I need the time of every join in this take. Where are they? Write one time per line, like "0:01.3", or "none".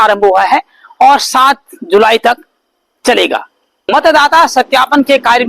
0:03.7